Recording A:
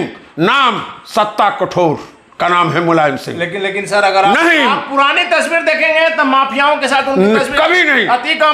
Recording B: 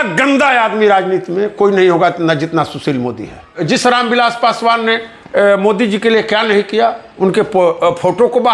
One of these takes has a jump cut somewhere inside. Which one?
B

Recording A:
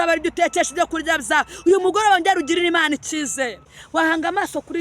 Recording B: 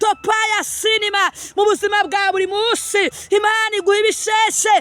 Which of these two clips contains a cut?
A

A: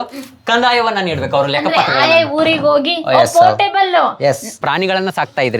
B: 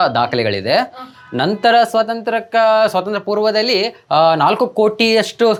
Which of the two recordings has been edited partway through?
A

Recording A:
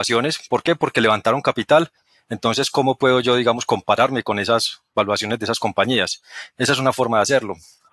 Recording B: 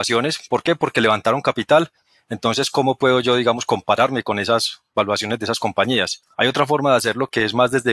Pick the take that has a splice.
B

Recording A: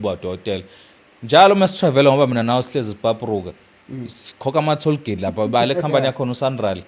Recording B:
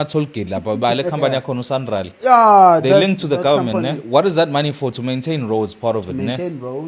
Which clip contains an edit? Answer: B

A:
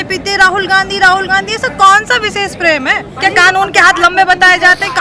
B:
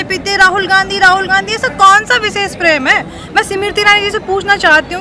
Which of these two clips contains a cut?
A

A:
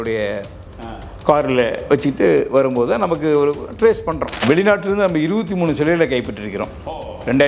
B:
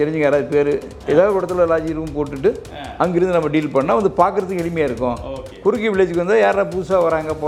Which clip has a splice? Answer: A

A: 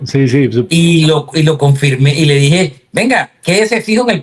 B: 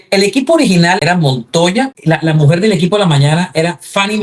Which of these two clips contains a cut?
B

